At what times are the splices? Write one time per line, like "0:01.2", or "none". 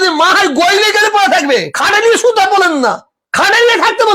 none